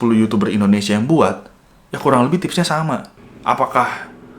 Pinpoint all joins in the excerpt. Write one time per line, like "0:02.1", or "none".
0:03.1